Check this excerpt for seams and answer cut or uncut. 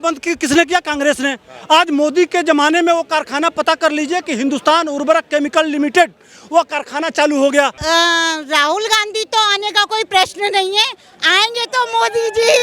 cut